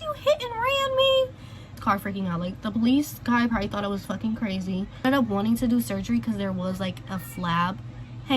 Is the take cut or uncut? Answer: cut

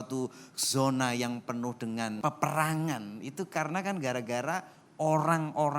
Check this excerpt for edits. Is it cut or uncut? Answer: cut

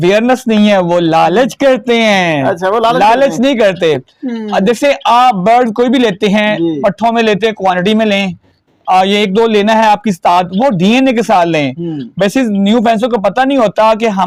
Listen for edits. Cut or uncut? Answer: uncut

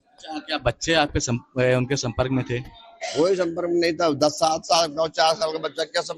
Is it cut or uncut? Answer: cut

